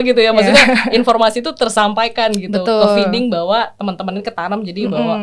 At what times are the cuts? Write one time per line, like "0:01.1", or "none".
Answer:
none